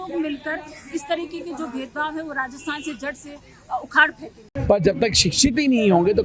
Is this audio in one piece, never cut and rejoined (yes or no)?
no